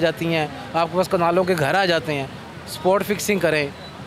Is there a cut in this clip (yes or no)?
yes